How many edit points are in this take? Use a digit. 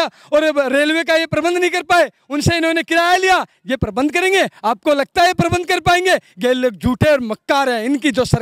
0